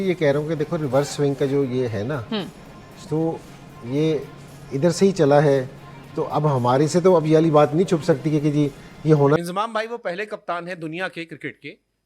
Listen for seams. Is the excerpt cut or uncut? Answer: cut